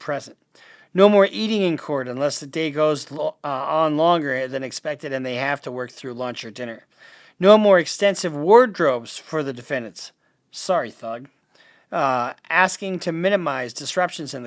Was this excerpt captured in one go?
yes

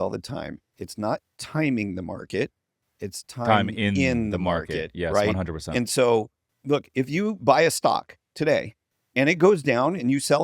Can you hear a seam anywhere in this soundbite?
yes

